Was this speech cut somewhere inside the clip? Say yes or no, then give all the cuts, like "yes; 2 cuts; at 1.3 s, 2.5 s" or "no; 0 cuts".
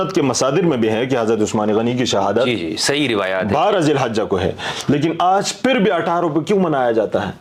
no; 0 cuts